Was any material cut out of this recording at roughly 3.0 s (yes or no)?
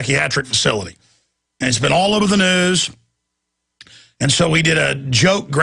yes